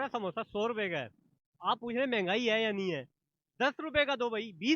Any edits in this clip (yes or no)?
no